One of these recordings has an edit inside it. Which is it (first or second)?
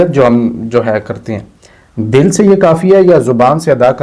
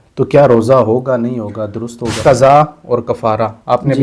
second